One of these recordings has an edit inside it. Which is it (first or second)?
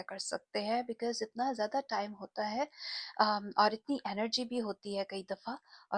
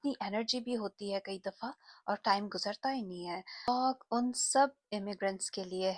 second